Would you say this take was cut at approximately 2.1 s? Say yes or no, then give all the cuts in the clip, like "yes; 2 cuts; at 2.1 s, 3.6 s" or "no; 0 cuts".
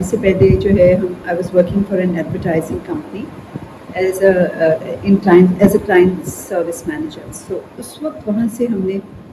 no; 0 cuts